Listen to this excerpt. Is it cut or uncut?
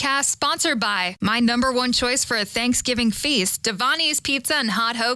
uncut